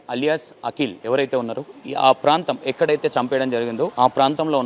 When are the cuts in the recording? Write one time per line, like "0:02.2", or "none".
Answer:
0:01.0
0:03.9